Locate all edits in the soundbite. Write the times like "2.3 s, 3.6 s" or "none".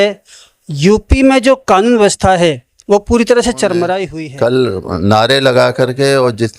4.1 s